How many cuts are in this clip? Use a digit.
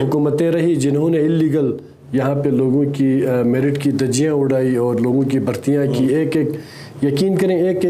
0